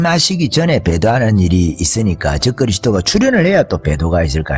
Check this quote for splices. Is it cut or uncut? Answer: uncut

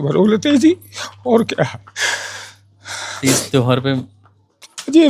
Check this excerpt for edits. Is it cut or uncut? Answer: uncut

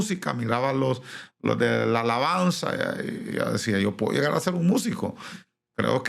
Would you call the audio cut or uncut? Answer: uncut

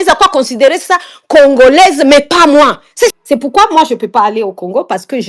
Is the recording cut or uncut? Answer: cut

